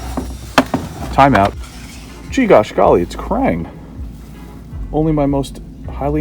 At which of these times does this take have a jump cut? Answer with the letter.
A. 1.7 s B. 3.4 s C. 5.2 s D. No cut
A